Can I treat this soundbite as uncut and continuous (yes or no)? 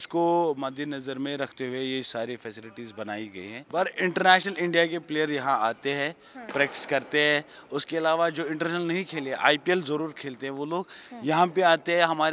no